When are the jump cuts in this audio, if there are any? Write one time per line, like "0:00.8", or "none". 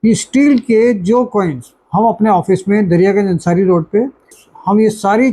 0:04.4